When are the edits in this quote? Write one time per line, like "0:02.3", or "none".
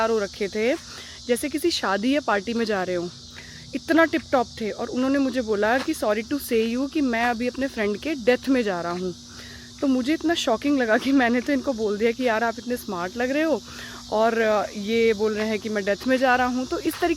none